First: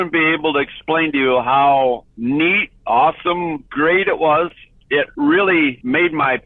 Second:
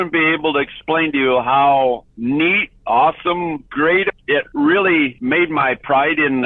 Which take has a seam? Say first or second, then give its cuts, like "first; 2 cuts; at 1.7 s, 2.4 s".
second; 1 cut; at 4.1 s